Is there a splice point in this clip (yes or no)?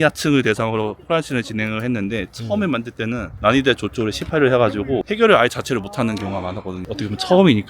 yes